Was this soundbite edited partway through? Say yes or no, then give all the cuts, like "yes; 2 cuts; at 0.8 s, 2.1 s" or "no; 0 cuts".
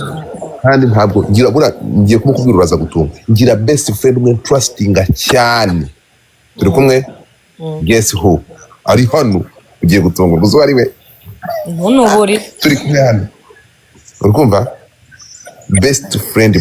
no; 0 cuts